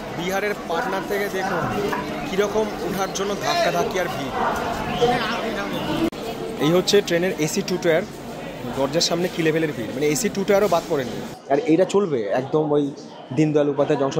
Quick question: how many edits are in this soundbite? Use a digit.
0